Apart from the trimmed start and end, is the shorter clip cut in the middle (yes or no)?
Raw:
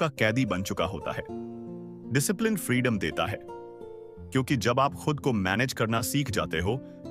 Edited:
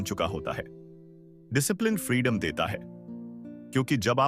no